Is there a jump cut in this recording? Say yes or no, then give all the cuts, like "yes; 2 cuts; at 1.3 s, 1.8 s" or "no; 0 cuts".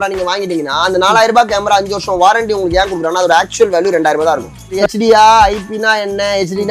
yes; 1 cut; at 4.8 s